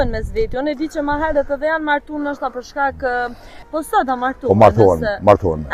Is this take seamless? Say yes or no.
no